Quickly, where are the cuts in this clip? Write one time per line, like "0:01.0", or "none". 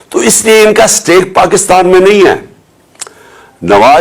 none